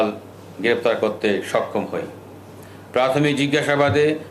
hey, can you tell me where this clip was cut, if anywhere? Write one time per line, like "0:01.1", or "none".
none